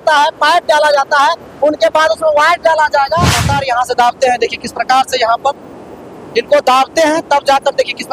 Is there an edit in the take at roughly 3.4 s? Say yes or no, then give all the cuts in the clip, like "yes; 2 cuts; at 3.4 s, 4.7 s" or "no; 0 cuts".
yes; 1 cut; at 3.4 s